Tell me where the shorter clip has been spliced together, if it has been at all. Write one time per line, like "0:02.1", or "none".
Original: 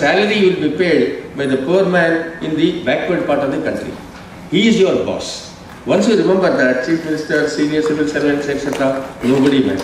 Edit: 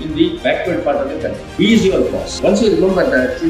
0:01.4
0:02.2